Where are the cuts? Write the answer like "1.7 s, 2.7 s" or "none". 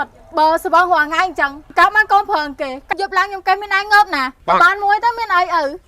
2.8 s